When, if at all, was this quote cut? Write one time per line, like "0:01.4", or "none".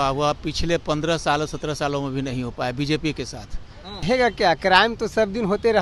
0:04.0